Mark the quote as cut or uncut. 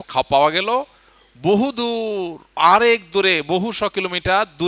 uncut